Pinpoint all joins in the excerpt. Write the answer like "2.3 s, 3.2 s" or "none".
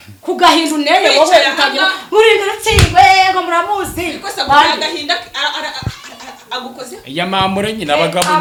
none